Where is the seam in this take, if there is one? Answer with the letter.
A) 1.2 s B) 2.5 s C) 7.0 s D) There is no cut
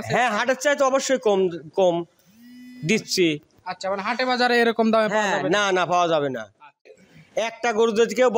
C